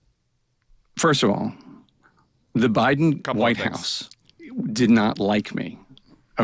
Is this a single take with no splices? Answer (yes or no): yes